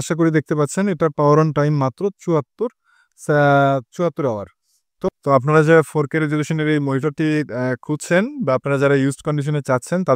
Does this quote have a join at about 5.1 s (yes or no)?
yes